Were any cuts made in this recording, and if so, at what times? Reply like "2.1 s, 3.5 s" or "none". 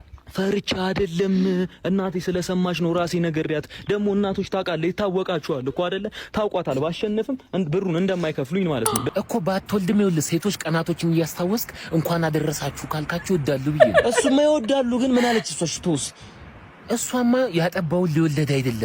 9.0 s